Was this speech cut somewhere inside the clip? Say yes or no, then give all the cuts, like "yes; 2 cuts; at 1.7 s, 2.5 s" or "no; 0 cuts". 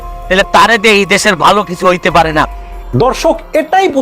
yes; 1 cut; at 2.7 s